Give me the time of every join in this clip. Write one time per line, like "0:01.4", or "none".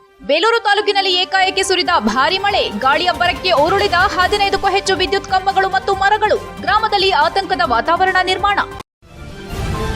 0:08.8